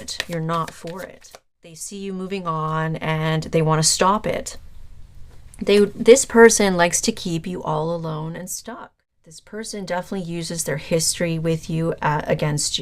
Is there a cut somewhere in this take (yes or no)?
yes